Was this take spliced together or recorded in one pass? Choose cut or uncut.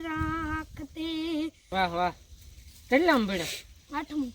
cut